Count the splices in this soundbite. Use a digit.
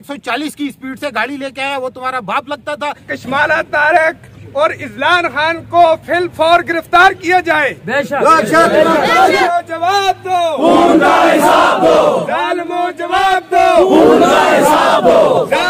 2